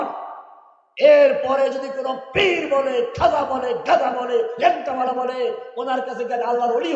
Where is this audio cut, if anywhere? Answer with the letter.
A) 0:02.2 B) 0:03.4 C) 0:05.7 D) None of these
D